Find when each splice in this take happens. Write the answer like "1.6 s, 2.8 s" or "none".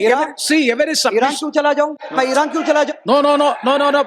2.0 s